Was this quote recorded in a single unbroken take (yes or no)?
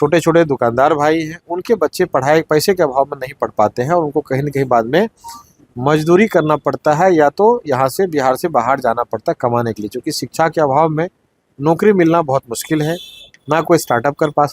yes